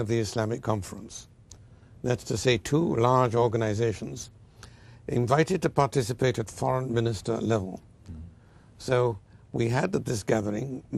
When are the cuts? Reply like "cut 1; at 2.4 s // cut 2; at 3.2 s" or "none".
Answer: cut 1; at 7.3 s

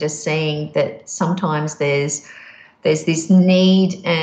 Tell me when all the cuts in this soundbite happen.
none

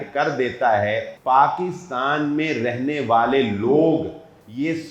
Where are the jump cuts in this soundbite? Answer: cut 1; at 1.1 s

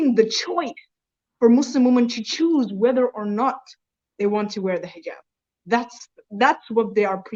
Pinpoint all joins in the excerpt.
none

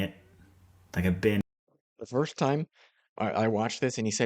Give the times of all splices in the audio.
cut 1; at 1.4 s

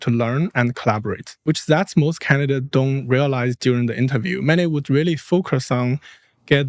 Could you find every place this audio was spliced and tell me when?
cut 1; at 1.4 s

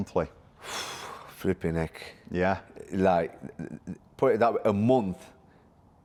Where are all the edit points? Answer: none

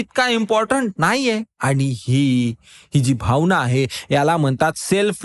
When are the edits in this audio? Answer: none

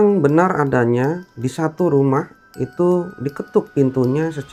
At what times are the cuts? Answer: none

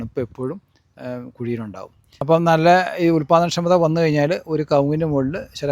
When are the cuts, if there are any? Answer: cut 1; at 2.2 s

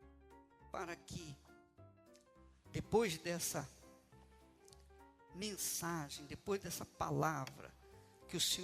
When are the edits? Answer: cut 1; at 0.7 s // cut 2; at 3.7 s // cut 3; at 5.3 s

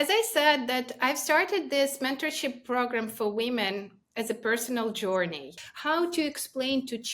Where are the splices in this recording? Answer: cut 1; at 5.6 s

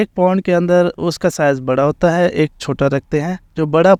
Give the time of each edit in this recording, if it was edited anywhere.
none

